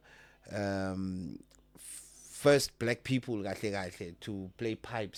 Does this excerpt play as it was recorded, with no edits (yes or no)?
yes